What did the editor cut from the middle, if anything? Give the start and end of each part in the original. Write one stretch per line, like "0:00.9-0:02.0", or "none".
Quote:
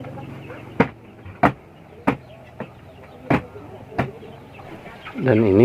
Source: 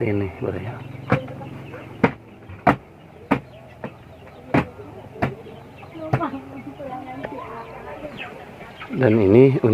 0:05.9-0:08.4